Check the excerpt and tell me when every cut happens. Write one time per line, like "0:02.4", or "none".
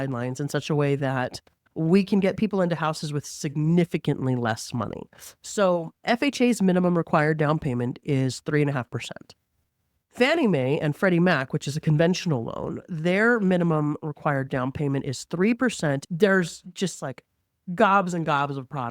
0:16.1